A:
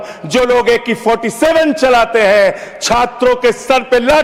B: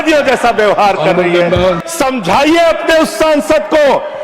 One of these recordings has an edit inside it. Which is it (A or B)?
B